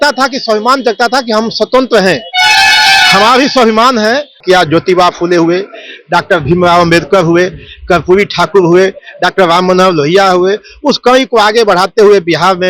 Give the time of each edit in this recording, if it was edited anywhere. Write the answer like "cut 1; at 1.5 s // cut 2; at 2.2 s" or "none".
cut 1; at 4.4 s